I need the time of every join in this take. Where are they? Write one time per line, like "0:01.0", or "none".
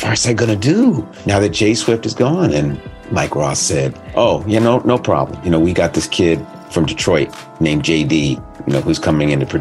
0:01.1
0:02.9
0:04.0
0:05.4
0:08.5